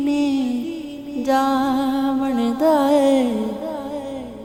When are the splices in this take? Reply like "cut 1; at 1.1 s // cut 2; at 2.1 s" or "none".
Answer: none